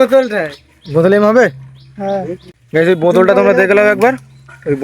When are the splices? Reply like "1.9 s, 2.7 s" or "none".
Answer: 2.4 s